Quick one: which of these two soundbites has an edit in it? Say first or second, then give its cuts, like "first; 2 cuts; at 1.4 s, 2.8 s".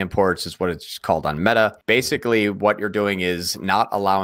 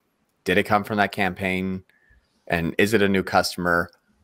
first; 1 cut; at 1.8 s